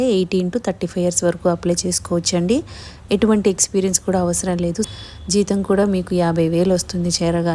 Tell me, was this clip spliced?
yes; 1 cut; at 5.0 s

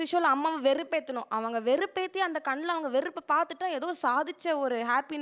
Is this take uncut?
yes; 0 cuts

